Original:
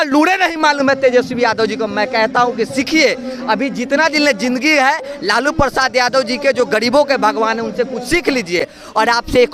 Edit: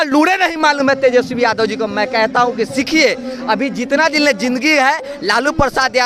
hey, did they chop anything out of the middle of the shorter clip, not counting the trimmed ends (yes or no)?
no